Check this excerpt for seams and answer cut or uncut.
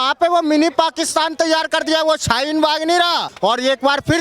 cut